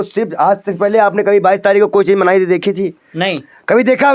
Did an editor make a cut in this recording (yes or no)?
no